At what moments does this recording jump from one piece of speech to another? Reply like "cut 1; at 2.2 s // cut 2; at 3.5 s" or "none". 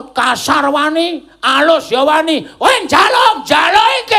none